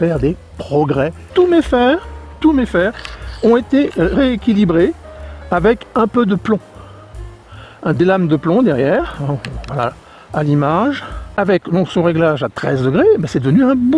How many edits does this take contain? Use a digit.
2